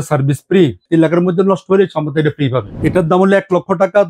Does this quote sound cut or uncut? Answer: cut